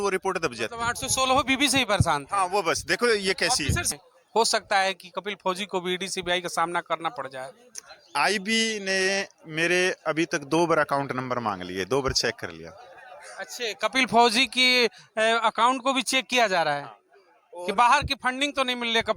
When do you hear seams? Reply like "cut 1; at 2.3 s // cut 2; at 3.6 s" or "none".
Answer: cut 1; at 3.9 s

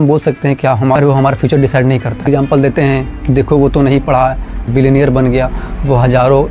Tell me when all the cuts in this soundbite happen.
cut 1; at 1.0 s // cut 2; at 2.3 s // cut 3; at 4.7 s

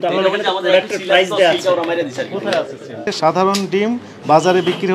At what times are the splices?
cut 1; at 3.1 s

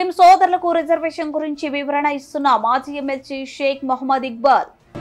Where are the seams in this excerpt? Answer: none

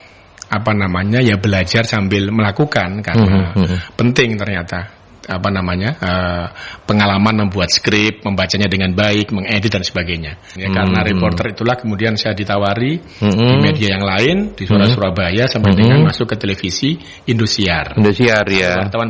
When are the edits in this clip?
cut 1; at 10.4 s

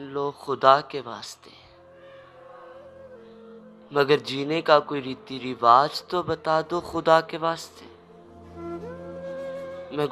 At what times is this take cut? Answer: none

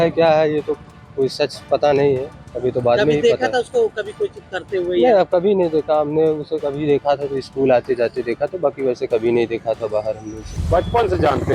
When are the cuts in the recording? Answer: cut 1; at 10.6 s

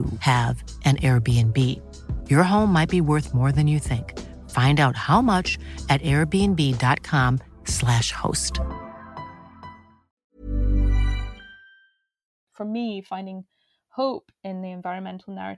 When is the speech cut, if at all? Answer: cut 1; at 12.5 s

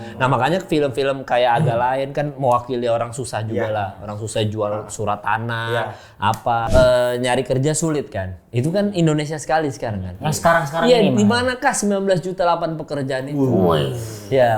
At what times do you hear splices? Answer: cut 1; at 6.6 s

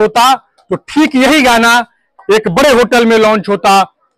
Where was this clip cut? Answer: none

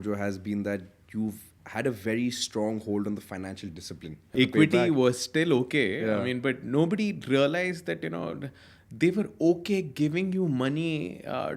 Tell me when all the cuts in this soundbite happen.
cut 1; at 4.3 s

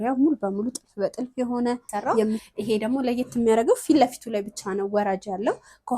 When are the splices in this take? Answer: cut 1; at 2.5 s

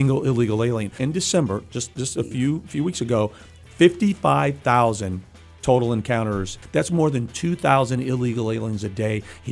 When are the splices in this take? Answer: cut 1; at 1.0 s // cut 2; at 6.6 s

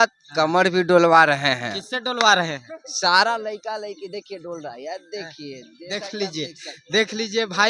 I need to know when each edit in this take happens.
none

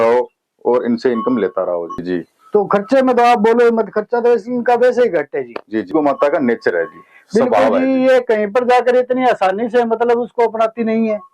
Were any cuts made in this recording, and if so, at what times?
cut 1; at 2.0 s // cut 2; at 5.9 s

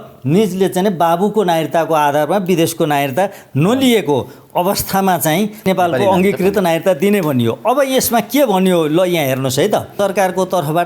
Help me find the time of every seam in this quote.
cut 1; at 5.7 s // cut 2; at 9.9 s

